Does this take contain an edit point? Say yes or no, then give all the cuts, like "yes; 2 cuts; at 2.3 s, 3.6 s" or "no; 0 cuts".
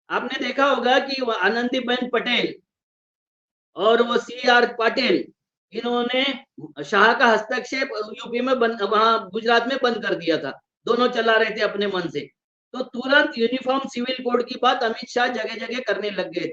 no; 0 cuts